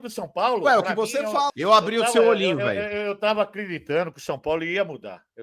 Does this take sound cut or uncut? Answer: cut